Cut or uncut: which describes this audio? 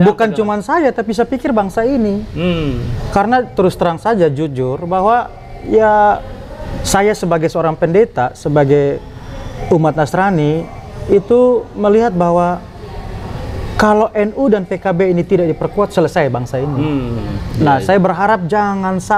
uncut